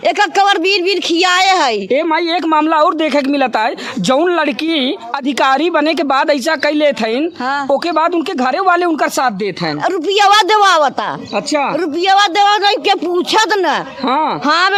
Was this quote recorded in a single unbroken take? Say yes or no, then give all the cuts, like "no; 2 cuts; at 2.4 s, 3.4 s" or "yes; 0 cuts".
yes; 0 cuts